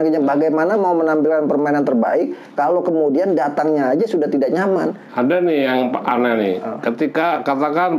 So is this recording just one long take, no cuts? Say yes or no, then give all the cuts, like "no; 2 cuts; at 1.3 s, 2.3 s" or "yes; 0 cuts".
yes; 0 cuts